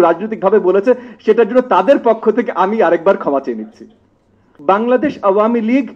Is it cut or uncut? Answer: cut